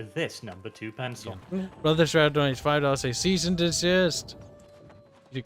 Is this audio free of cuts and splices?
no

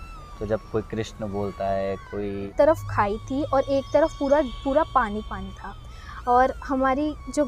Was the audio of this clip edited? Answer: yes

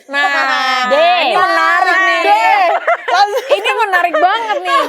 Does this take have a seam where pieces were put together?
no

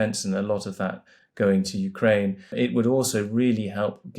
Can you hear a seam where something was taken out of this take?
yes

